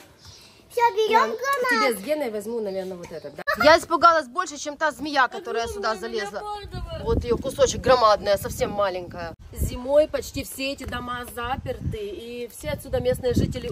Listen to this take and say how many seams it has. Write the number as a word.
two